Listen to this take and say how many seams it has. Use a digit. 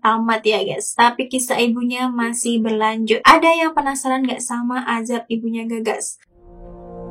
1